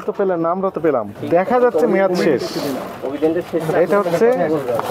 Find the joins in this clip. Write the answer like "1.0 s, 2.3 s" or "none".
1.1 s